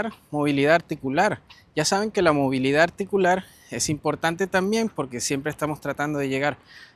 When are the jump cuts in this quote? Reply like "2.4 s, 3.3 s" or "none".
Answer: none